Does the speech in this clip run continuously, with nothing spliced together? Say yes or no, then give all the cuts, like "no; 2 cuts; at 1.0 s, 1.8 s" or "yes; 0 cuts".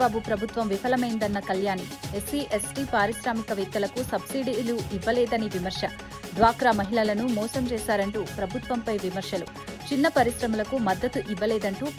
yes; 0 cuts